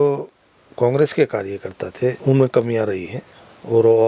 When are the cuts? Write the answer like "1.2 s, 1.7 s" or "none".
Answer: 2.2 s